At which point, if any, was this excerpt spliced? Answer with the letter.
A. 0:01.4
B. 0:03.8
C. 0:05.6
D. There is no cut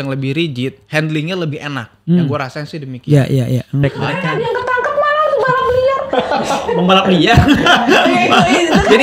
B